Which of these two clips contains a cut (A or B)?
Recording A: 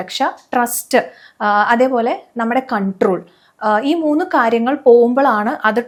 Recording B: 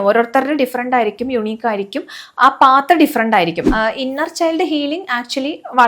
B